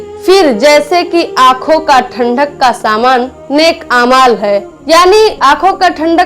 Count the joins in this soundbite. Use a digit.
1